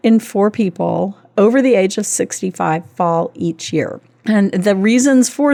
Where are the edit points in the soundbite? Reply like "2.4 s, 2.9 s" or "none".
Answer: none